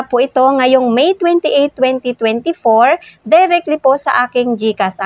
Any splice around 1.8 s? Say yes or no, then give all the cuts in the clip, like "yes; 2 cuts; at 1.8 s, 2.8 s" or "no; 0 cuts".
no; 0 cuts